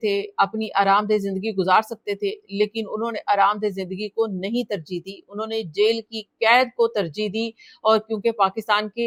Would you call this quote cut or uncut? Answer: uncut